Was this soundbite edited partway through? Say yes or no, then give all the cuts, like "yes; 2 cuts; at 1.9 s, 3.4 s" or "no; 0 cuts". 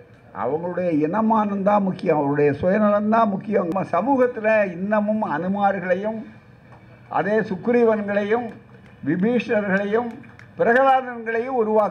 yes; 1 cut; at 3.7 s